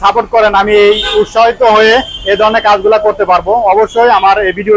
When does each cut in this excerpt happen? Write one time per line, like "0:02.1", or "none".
none